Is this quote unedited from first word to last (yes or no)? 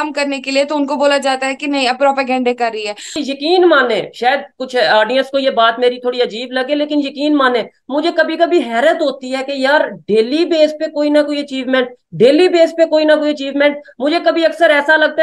no